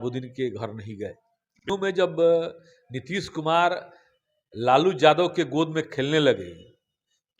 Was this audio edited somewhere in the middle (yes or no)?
yes